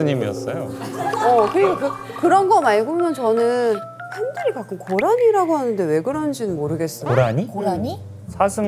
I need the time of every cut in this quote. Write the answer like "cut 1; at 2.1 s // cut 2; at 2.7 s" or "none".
cut 1; at 3.8 s